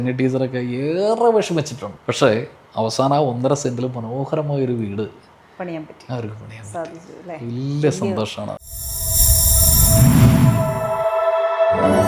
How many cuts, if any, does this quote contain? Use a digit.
0